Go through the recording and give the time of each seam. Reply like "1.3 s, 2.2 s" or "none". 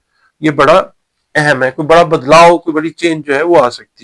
none